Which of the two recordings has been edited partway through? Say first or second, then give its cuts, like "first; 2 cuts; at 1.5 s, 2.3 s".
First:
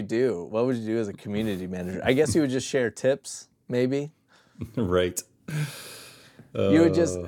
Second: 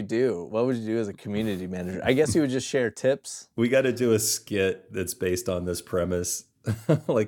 second; 1 cut; at 3.4 s